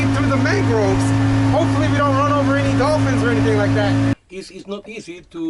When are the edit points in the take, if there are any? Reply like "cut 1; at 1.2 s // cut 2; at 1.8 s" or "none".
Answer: cut 1; at 4.1 s